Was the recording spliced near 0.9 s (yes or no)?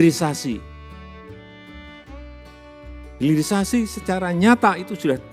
yes